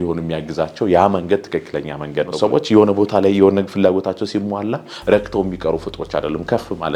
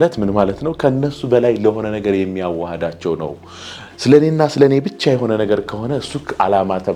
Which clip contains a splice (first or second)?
first